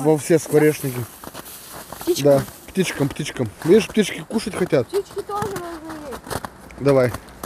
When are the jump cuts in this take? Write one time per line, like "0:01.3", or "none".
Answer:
none